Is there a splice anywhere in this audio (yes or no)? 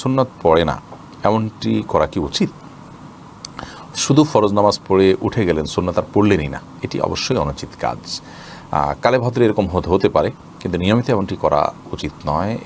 no